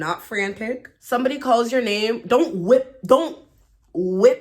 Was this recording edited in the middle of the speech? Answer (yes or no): yes